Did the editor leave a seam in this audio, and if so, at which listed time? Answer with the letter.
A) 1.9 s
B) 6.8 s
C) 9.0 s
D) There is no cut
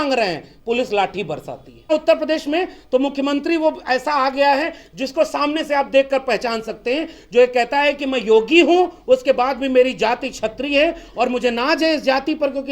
A